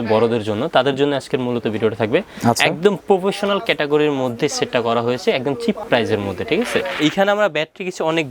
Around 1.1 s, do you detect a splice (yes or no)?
no